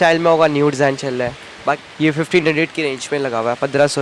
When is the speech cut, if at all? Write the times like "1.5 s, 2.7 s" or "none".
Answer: 1.9 s